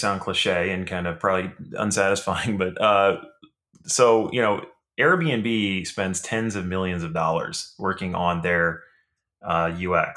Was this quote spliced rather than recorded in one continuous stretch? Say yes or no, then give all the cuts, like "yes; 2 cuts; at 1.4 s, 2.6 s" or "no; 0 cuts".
no; 0 cuts